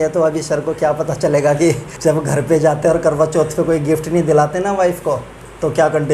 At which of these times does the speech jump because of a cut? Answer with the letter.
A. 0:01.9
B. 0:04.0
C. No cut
A